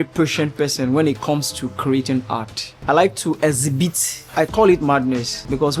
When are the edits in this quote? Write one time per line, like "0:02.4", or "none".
none